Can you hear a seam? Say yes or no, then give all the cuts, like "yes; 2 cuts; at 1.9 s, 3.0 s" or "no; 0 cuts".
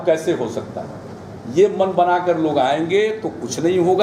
no; 0 cuts